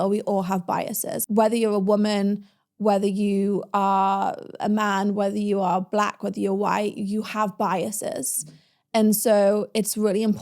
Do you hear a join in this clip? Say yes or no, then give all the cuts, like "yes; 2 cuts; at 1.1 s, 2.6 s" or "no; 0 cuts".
yes; 1 cut; at 1.1 s